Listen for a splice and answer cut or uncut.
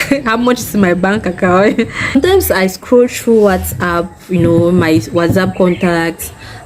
cut